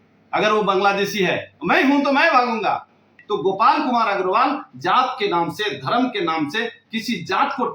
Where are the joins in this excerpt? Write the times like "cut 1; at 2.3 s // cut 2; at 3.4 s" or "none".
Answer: cut 1; at 3.1 s